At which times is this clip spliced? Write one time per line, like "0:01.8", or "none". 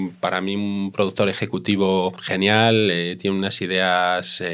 0:02.2